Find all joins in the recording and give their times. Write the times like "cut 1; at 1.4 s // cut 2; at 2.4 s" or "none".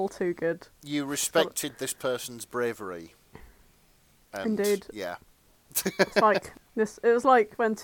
cut 1; at 6.6 s